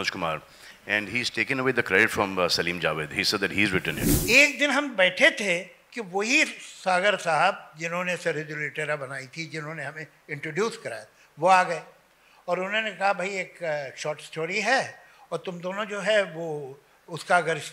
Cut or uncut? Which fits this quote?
cut